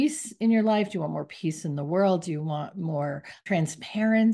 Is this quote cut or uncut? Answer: cut